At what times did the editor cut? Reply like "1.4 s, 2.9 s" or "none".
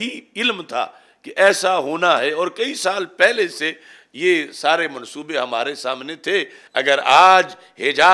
6.6 s